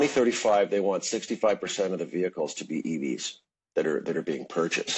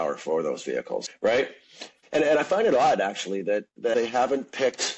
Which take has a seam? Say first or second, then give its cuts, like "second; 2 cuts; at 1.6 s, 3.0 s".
second; 3 cuts; at 1.1 s, 1.9 s, 3.9 s